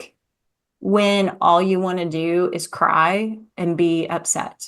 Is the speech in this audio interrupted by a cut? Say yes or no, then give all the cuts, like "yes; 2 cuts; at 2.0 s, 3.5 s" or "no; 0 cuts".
no; 0 cuts